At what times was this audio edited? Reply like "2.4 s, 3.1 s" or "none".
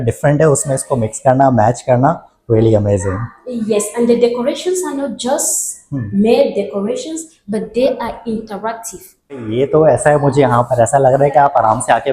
9.5 s